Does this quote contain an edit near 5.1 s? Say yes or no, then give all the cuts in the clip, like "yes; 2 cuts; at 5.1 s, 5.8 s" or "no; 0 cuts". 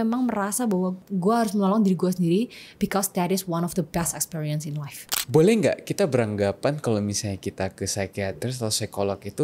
yes; 1 cut; at 5.1 s